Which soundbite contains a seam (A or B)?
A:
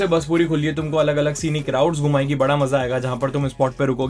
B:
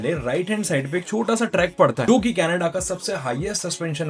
B